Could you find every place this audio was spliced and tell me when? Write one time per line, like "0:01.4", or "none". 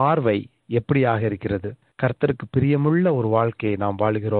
0:01.8